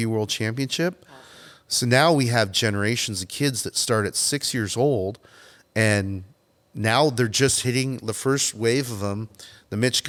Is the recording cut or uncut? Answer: uncut